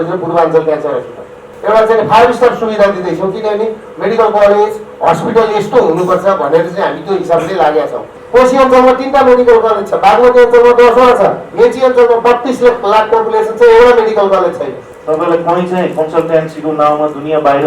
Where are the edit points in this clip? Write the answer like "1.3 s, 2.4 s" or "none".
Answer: 1.5 s, 8.1 s, 14.9 s